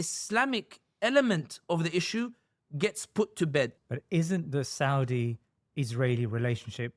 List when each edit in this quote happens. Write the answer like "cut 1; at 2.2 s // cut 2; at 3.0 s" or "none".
cut 1; at 3.7 s